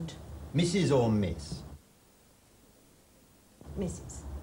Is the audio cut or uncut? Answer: uncut